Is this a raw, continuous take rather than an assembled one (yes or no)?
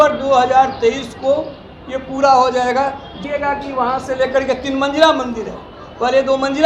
no